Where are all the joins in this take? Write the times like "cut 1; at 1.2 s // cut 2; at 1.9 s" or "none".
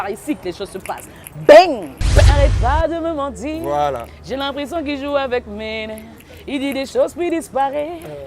cut 1; at 2.3 s

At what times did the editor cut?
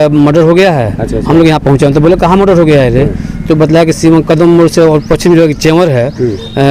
none

